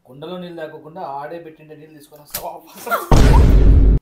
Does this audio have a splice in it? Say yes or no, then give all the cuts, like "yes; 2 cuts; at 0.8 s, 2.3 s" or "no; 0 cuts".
yes; 1 cut; at 3.0 s